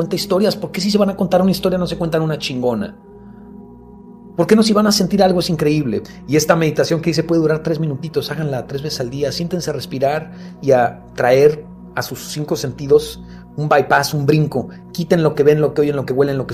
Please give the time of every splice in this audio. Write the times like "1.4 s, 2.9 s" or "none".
none